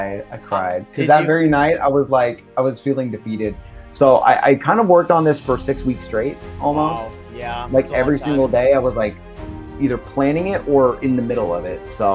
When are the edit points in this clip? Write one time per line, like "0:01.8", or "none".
0:03.7